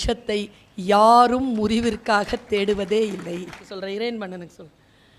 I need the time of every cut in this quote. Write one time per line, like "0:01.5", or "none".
0:03.7